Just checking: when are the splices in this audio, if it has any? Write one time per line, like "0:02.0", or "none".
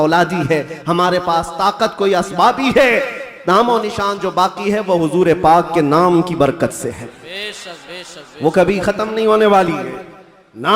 none